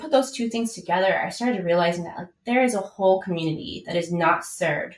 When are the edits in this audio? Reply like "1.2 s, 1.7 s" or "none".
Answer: none